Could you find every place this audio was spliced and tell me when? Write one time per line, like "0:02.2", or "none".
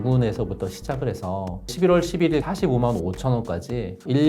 0:01.7